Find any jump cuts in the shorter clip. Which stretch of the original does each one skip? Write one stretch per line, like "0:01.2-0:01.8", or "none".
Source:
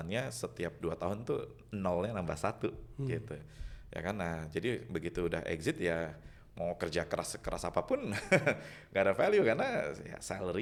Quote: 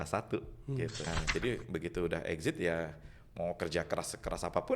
0:03.4-0:04.3